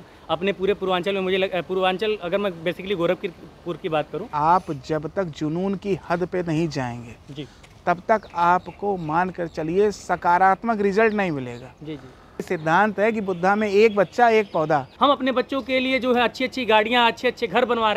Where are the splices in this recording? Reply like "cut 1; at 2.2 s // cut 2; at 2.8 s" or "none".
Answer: cut 1; at 4.3 s // cut 2; at 12.5 s // cut 3; at 14.9 s

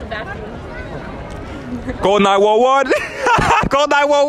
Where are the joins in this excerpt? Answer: none

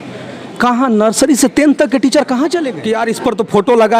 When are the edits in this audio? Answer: cut 1; at 2.8 s

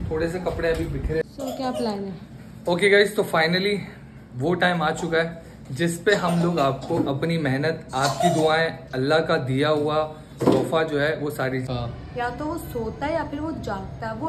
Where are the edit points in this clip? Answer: cut 1; at 1.3 s // cut 2; at 11.7 s

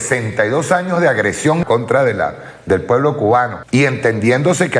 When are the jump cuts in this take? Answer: cut 1; at 1.6 s // cut 2; at 3.6 s

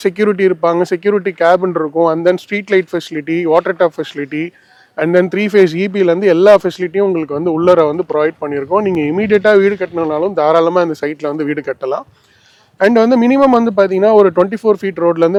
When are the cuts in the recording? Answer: none

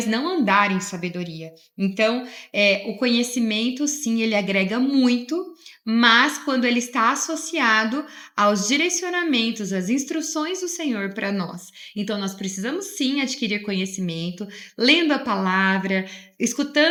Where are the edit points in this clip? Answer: none

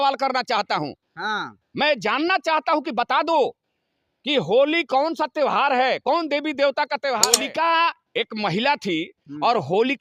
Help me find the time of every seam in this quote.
cut 1; at 7.4 s

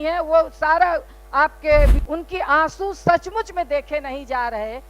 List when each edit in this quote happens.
cut 1; at 2.0 s

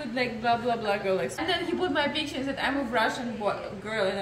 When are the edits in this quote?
cut 1; at 1.4 s

